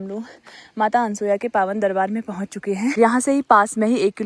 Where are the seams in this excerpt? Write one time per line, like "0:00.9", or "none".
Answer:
0:03.0